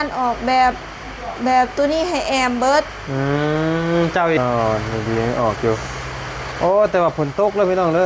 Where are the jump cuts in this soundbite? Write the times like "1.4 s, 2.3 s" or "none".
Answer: 4.4 s